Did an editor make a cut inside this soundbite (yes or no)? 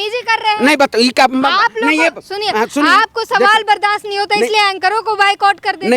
no